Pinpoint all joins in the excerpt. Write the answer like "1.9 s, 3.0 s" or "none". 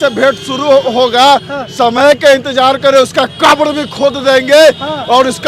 none